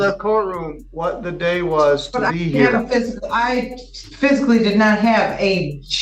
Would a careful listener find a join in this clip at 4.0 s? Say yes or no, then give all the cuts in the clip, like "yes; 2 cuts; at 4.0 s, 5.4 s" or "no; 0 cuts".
no; 0 cuts